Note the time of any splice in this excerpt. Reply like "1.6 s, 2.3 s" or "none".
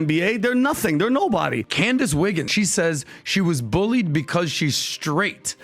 1.6 s, 2.5 s